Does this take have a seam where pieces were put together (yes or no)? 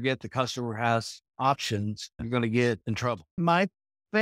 yes